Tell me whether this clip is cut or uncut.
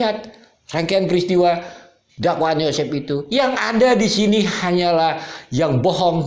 uncut